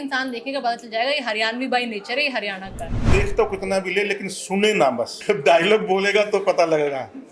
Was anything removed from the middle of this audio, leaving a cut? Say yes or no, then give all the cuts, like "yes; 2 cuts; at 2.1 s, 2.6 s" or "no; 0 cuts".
yes; 2 cuts; at 3.1 s, 5.2 s